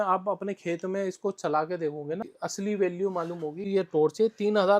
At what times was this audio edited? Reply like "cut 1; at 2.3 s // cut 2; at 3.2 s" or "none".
cut 1; at 2.3 s // cut 2; at 3.7 s